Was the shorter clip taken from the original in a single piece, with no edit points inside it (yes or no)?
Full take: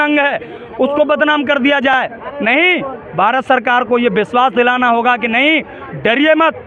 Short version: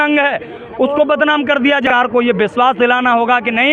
no